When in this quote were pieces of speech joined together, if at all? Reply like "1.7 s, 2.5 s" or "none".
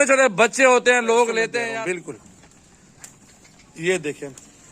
1.6 s